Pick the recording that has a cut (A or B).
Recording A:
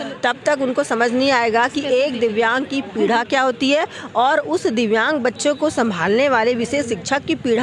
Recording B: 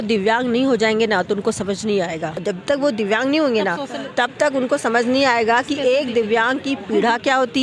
B